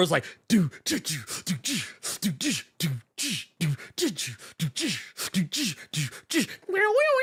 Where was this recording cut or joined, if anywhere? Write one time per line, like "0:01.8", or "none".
none